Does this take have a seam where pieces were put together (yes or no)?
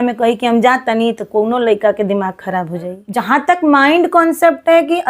yes